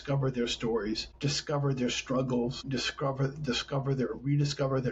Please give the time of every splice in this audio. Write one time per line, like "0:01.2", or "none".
0:01.1
0:02.6